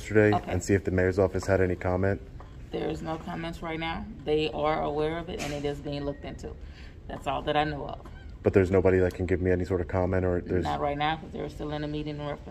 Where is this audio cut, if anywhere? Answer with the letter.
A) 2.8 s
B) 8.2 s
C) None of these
C